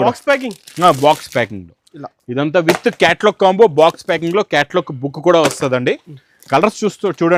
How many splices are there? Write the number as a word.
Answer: zero